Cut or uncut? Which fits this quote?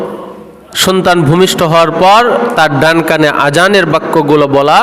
uncut